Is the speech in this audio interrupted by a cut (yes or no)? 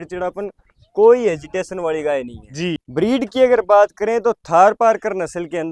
yes